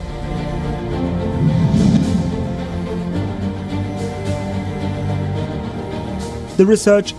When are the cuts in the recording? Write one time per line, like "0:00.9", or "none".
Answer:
0:01.2